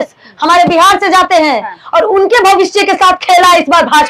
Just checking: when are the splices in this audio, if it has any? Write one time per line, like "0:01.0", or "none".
none